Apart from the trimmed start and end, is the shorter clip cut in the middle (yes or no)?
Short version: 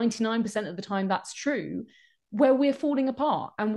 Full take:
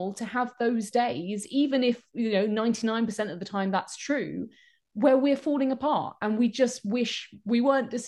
no